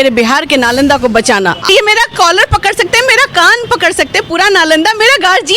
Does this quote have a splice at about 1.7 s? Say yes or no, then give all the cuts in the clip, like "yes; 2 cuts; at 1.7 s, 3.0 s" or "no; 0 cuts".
yes; 1 cut; at 1.7 s